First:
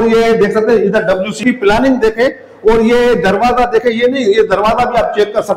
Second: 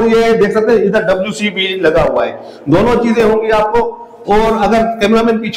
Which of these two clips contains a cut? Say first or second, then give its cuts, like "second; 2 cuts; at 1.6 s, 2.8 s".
first; 1 cut; at 1.4 s